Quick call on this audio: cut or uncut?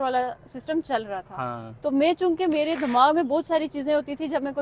uncut